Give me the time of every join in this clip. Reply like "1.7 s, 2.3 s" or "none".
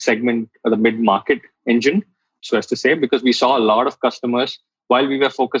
2.4 s